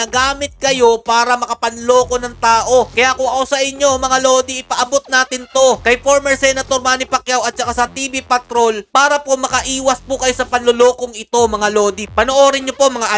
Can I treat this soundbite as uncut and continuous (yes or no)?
yes